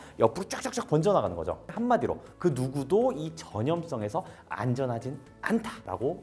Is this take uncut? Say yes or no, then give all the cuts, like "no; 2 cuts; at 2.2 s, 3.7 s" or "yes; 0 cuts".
no; 1 cut; at 1.7 s